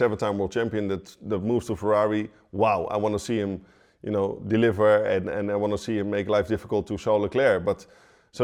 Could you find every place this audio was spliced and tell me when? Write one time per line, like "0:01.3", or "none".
none